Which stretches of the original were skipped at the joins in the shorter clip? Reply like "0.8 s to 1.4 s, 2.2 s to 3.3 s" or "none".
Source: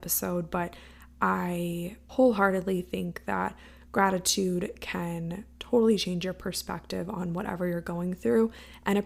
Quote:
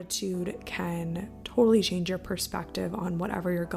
none